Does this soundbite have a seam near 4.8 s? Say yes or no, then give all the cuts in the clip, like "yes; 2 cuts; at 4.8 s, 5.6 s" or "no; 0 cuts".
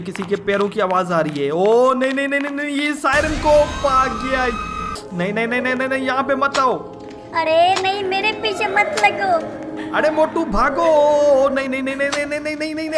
yes; 1 cut; at 4.8 s